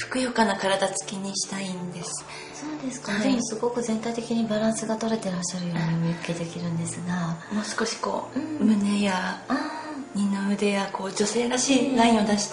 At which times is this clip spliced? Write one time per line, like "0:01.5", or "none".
none